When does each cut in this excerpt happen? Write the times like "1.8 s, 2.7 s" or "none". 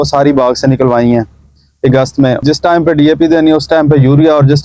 2.4 s